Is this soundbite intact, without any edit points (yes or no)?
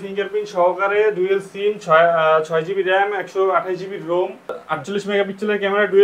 no